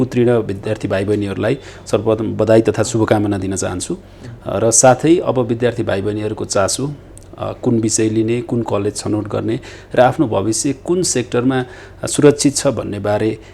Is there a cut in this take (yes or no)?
no